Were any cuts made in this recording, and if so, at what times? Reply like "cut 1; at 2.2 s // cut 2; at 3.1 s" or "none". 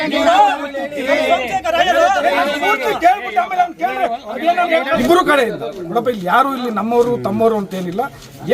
cut 1; at 5.0 s